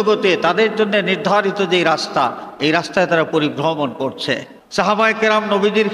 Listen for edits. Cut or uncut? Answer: cut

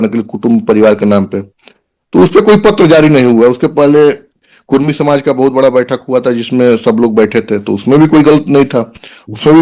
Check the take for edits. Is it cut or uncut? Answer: uncut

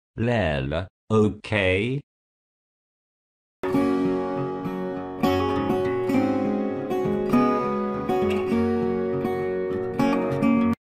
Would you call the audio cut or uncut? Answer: uncut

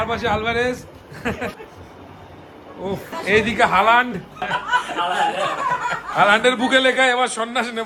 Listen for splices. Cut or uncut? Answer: uncut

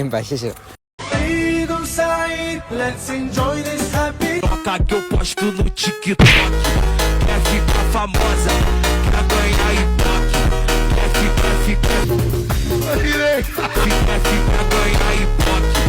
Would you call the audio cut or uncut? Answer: cut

